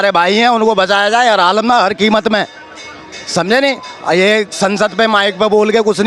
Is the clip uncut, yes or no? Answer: yes